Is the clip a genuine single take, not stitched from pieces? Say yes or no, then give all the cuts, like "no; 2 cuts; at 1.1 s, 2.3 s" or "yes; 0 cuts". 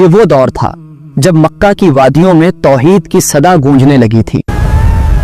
yes; 0 cuts